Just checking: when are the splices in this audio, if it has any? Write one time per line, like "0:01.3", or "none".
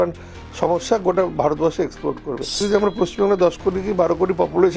0:02.6